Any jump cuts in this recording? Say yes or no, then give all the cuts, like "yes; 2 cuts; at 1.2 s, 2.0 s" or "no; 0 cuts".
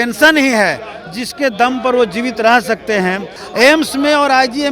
yes; 1 cut; at 3.4 s